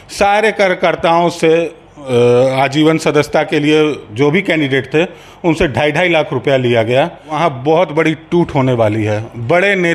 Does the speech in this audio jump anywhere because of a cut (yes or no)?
yes